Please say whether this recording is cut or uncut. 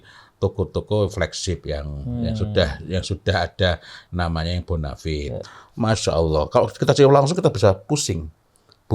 cut